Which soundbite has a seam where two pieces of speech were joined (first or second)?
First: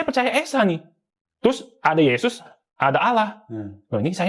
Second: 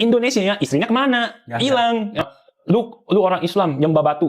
second